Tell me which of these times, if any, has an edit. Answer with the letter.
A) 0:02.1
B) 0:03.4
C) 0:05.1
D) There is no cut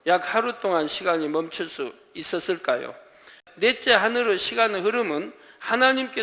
B